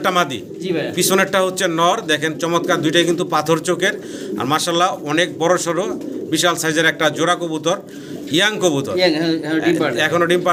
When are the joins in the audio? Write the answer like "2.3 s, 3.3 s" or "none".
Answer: none